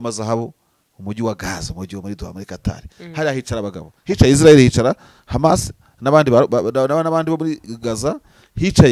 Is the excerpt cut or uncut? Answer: uncut